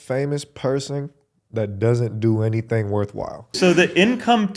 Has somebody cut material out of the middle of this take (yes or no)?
yes